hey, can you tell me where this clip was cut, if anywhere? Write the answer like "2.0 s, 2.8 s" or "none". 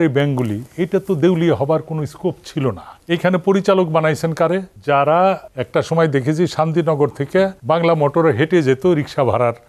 2.9 s, 4.7 s, 5.5 s, 7.6 s